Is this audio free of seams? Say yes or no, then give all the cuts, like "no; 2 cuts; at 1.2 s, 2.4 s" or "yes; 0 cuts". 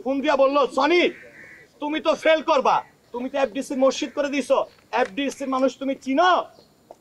no; 1 cut; at 3.1 s